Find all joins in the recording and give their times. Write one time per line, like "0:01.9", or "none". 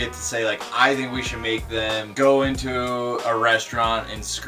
0:02.1